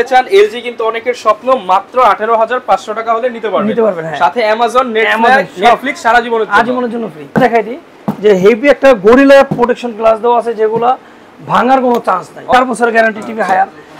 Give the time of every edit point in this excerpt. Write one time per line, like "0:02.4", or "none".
0:07.4
0:12.5